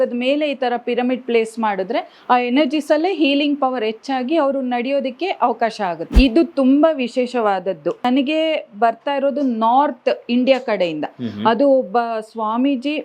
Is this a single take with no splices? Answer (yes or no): no